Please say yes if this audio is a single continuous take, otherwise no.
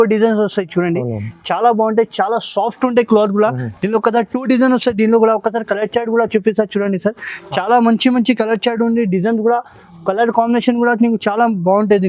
yes